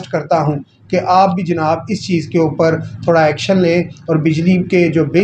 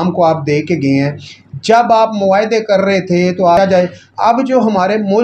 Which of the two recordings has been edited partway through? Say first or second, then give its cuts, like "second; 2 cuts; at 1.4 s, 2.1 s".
second; 1 cut; at 3.6 s